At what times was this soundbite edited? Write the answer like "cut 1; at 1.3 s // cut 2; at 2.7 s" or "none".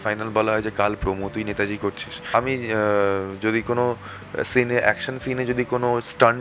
cut 1; at 2.3 s